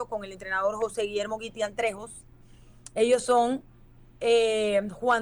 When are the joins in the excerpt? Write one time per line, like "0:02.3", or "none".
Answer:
none